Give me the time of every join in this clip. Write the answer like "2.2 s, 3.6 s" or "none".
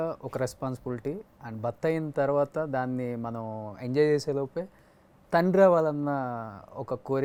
none